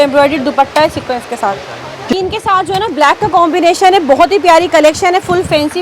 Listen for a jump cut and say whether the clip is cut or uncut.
cut